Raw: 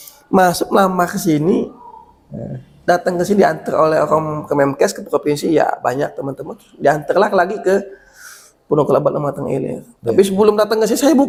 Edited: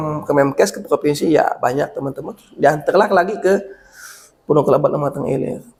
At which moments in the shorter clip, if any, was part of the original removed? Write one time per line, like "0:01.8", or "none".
none